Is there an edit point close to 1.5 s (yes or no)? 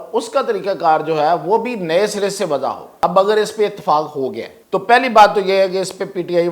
no